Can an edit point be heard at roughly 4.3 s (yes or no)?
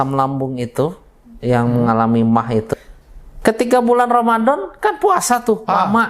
no